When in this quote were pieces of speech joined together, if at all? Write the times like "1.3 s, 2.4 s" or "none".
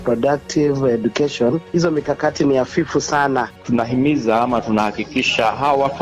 1.6 s, 3.6 s